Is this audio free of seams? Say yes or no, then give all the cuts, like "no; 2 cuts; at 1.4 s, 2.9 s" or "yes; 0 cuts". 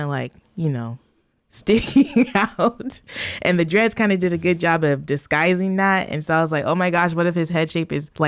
yes; 0 cuts